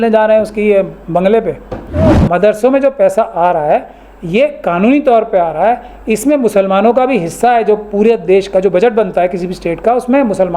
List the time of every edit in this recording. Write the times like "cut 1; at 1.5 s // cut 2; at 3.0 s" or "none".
cut 1; at 2.1 s